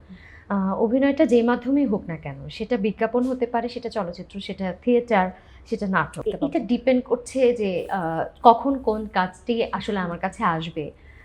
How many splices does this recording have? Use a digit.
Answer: 1